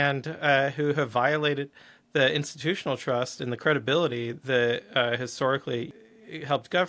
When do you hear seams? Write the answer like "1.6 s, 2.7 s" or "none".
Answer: 5.9 s